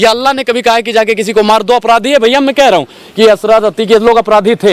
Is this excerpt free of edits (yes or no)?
yes